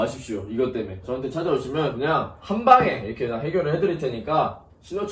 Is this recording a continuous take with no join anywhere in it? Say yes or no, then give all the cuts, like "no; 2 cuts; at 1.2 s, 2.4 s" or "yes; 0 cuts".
no; 1 cut; at 1.0 s